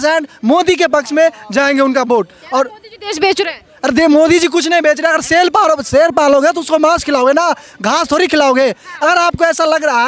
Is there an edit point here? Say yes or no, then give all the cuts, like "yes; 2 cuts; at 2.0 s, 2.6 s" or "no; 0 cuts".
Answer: no; 0 cuts